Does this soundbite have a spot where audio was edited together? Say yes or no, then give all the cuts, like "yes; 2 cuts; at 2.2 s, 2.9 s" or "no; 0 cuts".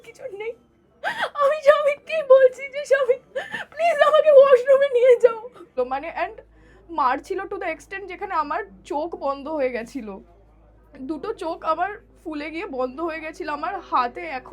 yes; 1 cut; at 5.6 s